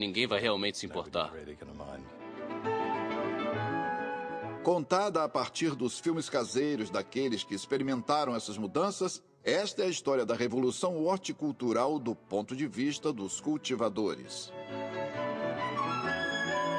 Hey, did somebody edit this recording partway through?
yes; 1 cut; at 9.2 s

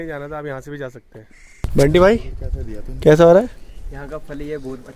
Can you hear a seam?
yes; 1 cut; at 1.6 s

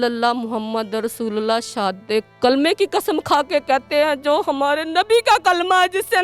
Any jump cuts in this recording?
no; 0 cuts

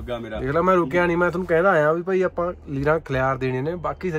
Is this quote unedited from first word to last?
yes; 0 cuts

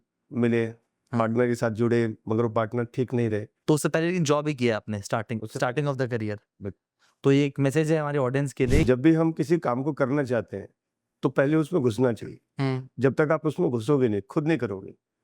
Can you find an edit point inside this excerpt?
yes; 2 cuts; at 3.5 s, 8.8 s

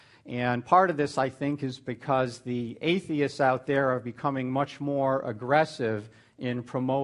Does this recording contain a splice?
no; 0 cuts

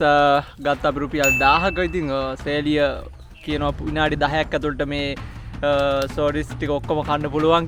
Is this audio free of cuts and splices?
yes; 0 cuts

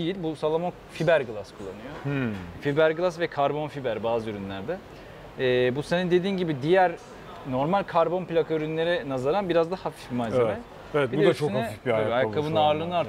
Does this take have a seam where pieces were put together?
no; 0 cuts

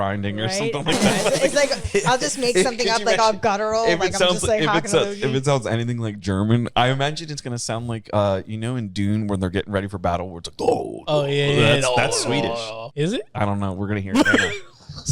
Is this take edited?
yes; 1 cut; at 12.8 s

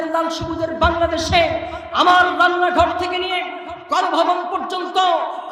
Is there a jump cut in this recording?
no; 0 cuts

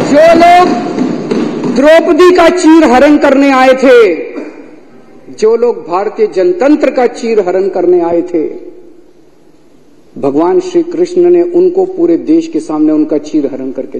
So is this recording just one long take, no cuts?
yes; 0 cuts

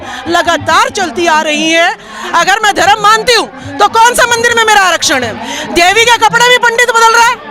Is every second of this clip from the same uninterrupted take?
no; 1 cut; at 2.1 s

